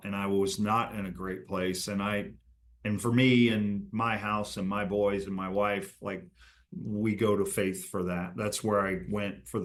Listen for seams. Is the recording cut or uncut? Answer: uncut